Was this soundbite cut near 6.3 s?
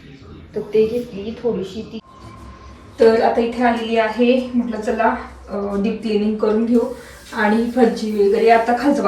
no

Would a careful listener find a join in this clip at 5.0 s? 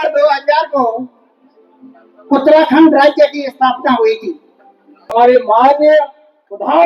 yes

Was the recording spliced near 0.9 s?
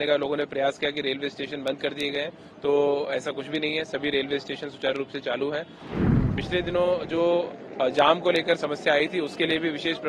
no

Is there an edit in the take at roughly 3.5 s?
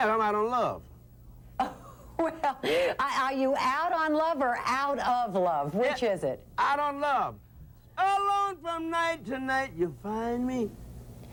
no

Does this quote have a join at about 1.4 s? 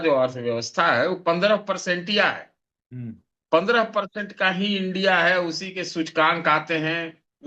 no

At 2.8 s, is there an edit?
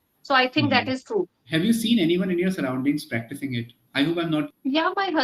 no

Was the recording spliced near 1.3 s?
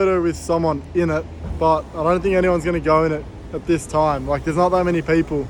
no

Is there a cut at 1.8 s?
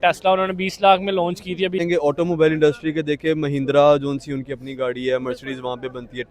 yes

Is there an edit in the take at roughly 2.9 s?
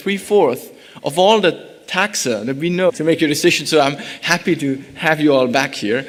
no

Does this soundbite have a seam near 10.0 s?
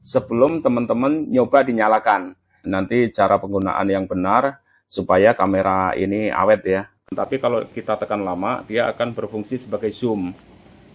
no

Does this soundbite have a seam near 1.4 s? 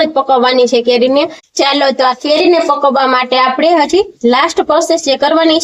yes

